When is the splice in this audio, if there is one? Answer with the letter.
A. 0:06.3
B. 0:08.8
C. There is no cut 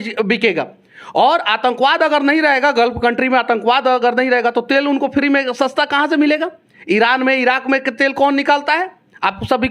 C